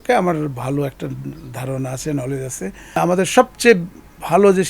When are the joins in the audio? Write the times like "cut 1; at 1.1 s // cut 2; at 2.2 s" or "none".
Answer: cut 1; at 3.0 s